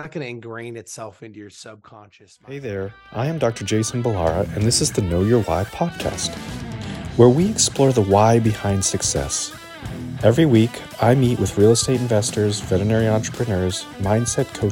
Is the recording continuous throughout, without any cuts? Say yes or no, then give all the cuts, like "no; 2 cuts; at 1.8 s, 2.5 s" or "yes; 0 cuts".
no; 1 cut; at 2.4 s